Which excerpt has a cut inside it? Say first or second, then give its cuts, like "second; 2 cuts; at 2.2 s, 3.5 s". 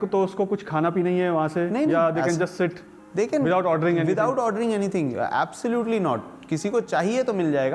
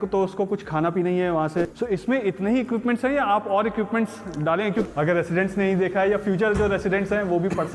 second; 2 cuts; at 1.7 s, 4.8 s